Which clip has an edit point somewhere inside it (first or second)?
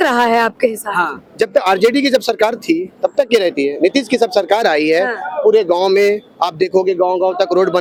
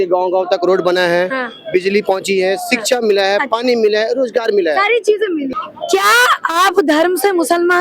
second